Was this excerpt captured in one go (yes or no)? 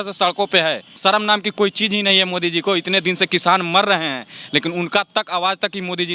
no